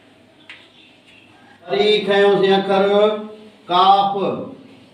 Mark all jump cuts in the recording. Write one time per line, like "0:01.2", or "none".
0:01.7

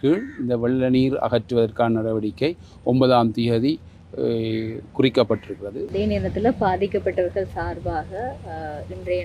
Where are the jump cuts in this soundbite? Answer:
0:05.8

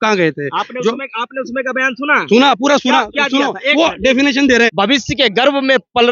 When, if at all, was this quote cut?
0:04.7

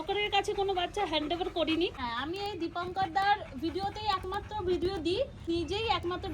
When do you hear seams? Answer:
0:02.0
0:05.5

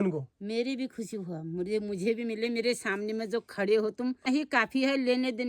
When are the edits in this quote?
0:04.2

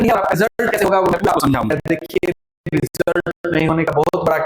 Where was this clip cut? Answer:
0:01.7

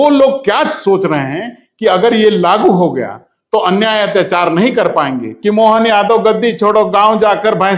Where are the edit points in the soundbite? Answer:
0:05.3

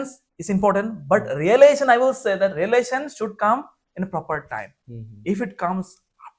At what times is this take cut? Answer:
none

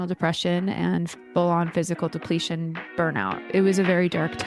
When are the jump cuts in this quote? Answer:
0:03.4

